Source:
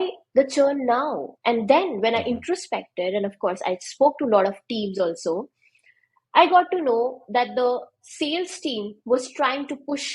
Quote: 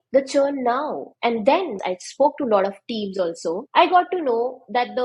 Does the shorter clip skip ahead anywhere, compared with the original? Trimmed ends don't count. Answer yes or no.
yes